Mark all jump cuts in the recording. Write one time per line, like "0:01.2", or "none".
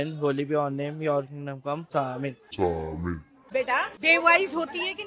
0:01.9
0:03.5

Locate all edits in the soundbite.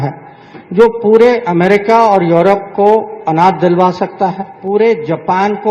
0:04.5

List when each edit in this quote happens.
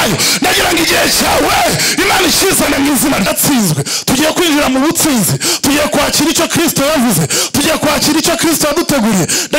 0:03.3

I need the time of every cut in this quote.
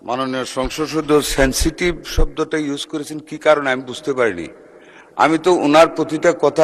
none

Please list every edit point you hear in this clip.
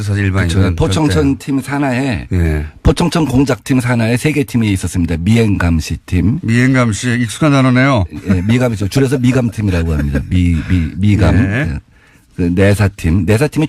0:08.8

